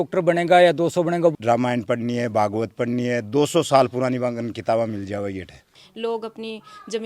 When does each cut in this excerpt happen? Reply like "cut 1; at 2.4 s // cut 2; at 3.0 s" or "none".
cut 1; at 1.3 s // cut 2; at 5.8 s